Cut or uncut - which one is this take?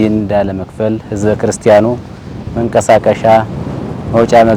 uncut